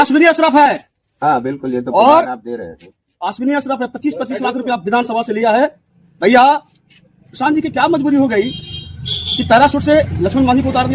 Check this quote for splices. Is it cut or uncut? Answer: uncut